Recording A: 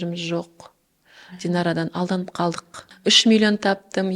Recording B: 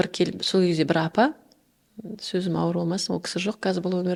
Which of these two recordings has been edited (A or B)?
A